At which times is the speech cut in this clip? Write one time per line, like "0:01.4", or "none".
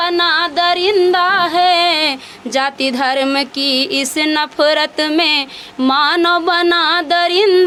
none